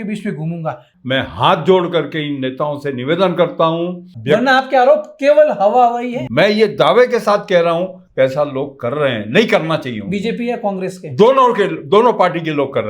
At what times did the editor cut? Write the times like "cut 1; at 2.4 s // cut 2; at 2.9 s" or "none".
cut 1; at 0.9 s // cut 2; at 4.1 s // cut 3; at 6.2 s